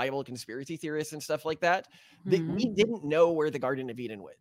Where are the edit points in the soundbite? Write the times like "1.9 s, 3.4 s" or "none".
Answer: none